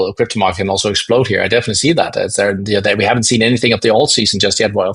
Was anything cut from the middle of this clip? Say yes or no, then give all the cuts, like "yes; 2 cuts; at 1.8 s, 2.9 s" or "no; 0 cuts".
no; 0 cuts